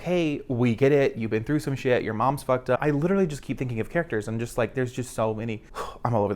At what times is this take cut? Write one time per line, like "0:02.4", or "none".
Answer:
0:02.8

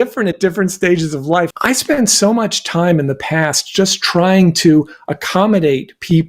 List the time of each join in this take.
0:01.5

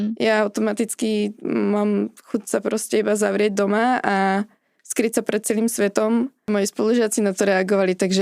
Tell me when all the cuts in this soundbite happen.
0:06.5

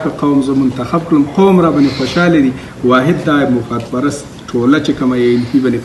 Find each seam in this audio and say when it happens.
none

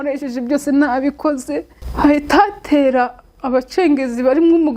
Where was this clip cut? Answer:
0:01.8

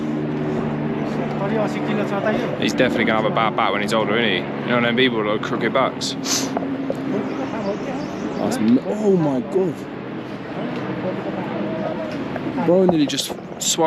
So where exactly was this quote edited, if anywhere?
none

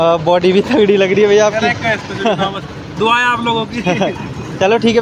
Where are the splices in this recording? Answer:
none

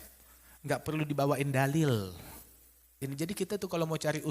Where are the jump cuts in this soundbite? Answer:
0:03.0

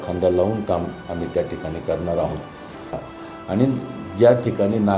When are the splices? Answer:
0:03.0

